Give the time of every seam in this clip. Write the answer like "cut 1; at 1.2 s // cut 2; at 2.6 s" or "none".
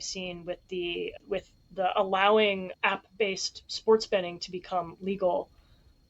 cut 1; at 1.1 s // cut 2; at 2.7 s